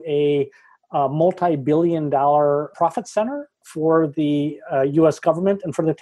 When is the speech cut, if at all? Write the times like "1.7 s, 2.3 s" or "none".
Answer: 2.7 s